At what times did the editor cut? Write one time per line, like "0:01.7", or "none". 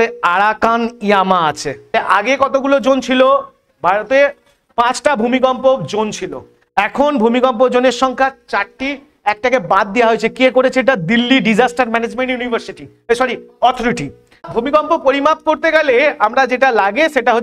0:01.9
0:14.5